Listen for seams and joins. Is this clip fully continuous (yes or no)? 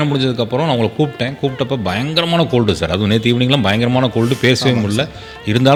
yes